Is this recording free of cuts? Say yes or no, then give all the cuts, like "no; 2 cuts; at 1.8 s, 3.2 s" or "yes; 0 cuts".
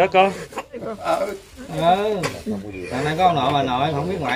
yes; 0 cuts